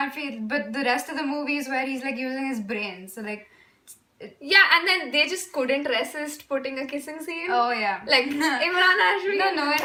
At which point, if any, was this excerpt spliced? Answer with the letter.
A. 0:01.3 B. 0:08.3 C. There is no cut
C